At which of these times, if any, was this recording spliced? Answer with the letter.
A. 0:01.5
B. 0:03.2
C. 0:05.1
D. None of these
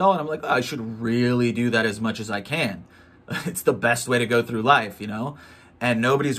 D